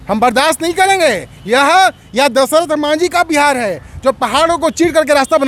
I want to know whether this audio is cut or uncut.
uncut